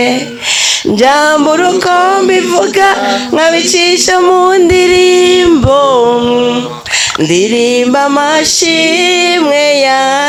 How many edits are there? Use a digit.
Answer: 0